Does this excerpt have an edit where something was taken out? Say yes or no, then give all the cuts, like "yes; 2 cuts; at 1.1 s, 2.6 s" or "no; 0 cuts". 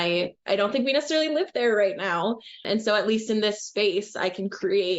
yes; 1 cut; at 2.6 s